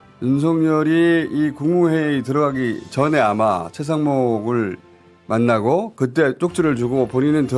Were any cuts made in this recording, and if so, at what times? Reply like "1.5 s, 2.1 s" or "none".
none